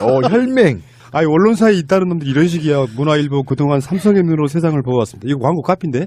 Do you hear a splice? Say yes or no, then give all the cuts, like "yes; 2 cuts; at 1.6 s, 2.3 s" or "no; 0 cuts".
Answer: no; 0 cuts